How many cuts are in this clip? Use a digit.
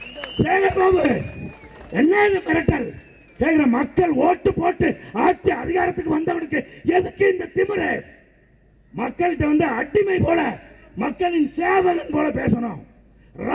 0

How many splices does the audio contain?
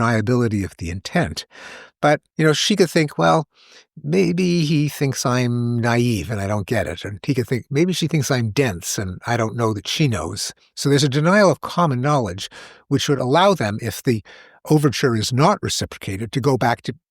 1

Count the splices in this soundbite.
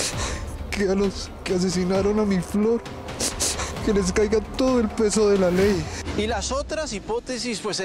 1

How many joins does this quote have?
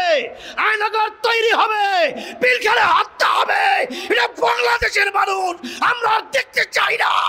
0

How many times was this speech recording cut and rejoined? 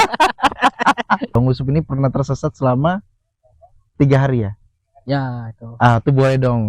1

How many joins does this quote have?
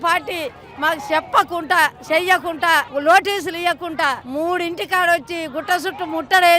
2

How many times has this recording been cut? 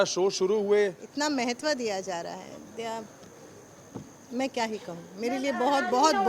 1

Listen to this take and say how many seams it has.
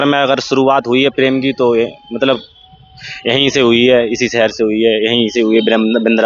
0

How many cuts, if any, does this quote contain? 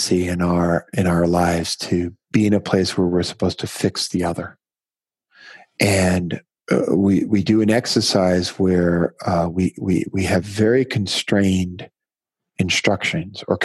2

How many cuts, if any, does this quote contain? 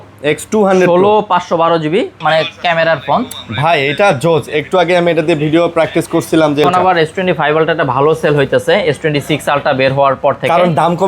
2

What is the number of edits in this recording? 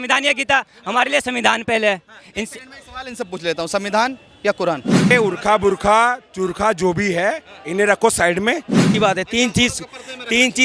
2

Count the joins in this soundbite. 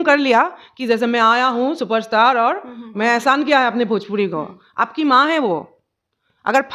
0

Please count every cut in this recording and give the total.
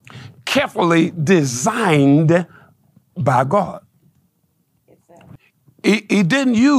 1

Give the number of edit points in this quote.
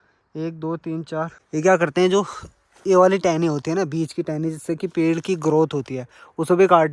1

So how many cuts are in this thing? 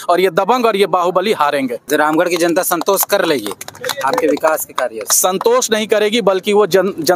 1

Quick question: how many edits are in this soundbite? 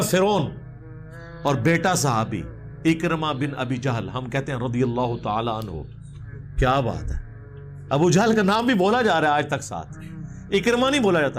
0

